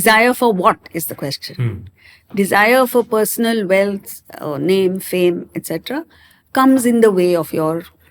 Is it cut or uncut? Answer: uncut